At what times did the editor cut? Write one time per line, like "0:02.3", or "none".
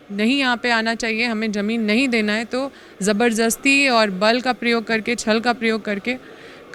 none